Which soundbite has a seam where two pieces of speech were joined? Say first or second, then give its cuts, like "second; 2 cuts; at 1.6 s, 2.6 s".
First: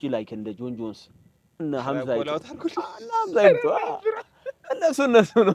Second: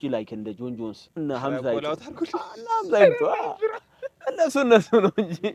second; 1 cut; at 1.0 s